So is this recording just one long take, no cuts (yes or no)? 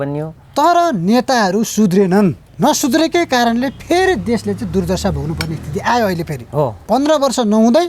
no